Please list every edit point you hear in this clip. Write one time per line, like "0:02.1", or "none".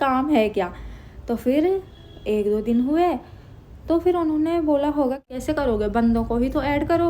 0:05.2